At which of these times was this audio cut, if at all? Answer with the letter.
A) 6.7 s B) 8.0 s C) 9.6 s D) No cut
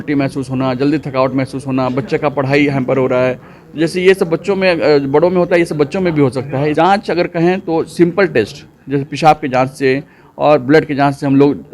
A